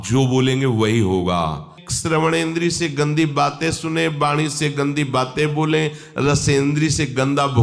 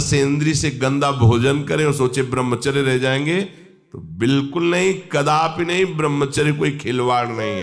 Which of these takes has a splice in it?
first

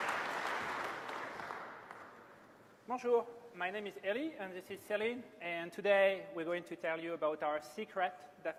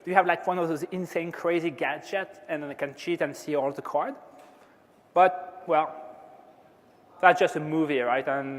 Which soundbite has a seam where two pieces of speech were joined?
second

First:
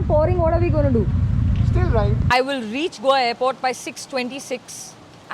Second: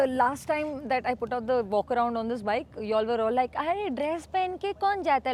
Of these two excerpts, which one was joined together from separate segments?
first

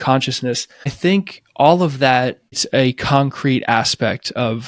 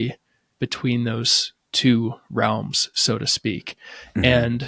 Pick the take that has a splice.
first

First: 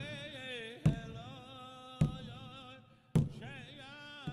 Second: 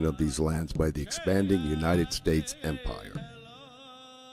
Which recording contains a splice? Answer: second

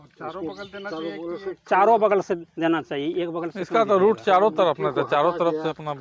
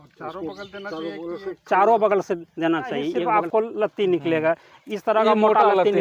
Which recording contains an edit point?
second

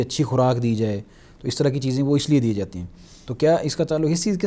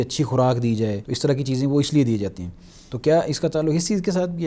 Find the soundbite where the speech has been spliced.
second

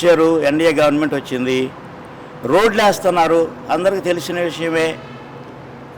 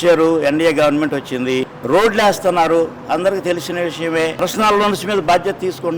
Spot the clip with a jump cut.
second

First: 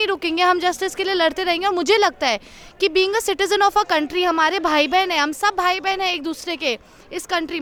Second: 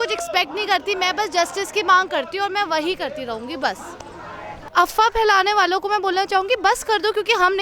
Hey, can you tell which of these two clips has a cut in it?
second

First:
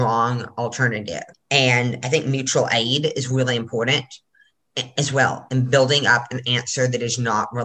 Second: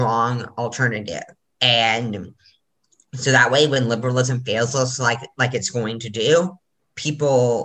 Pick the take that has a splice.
first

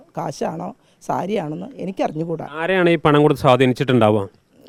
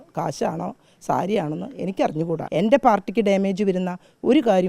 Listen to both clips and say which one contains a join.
second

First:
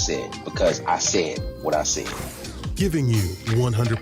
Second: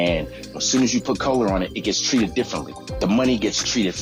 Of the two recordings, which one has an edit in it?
first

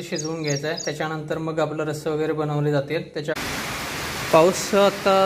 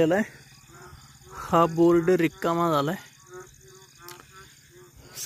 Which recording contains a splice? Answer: first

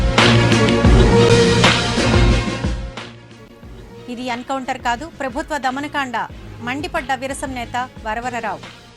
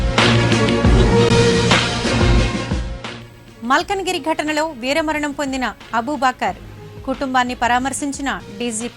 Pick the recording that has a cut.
first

